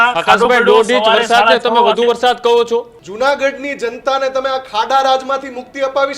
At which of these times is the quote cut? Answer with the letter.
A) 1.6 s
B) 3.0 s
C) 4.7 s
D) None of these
B